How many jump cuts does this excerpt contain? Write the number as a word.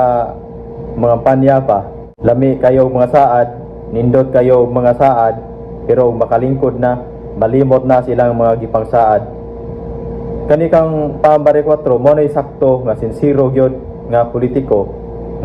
zero